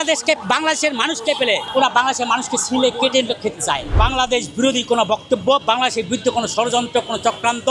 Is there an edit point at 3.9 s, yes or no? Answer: yes